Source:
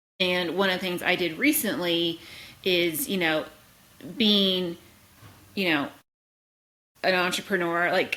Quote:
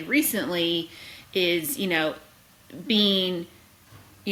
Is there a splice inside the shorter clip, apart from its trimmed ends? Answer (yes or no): no